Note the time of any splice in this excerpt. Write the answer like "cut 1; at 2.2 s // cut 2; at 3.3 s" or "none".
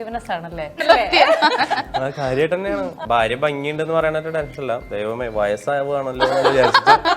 cut 1; at 0.8 s // cut 2; at 3.0 s

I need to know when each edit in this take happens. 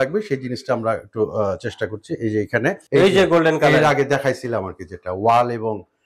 cut 1; at 2.8 s

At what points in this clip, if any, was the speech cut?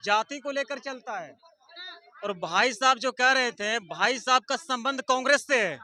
none

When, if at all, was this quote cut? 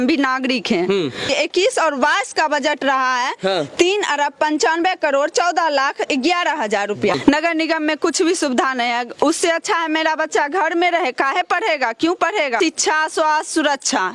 cut 1; at 1.3 s // cut 2; at 7.2 s // cut 3; at 12.5 s

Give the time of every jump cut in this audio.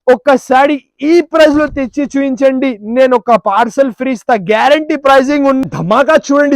cut 1; at 5.6 s

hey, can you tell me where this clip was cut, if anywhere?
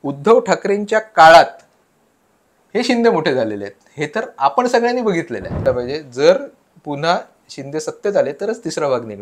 cut 1; at 5.6 s

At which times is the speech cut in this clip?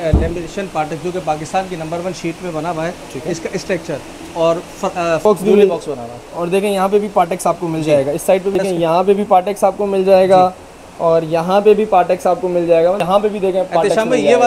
cut 1; at 5.2 s // cut 2; at 8.5 s // cut 3; at 13.0 s

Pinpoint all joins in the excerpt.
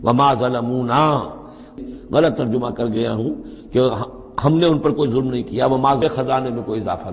cut 1; at 1.7 s // cut 2; at 6.0 s

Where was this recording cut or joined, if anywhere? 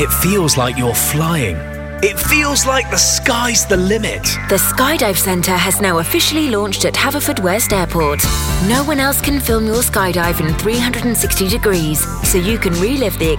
none

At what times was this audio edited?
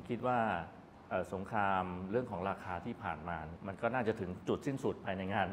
cut 1; at 3.5 s

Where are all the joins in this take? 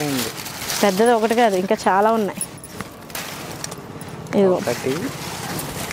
none

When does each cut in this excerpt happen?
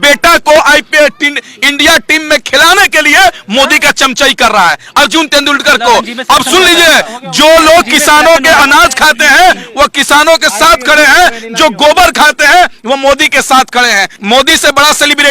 cut 1; at 14.1 s

